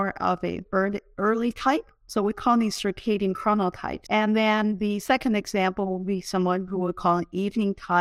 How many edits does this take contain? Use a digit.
2